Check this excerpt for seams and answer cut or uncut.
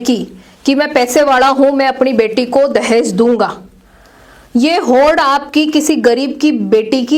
uncut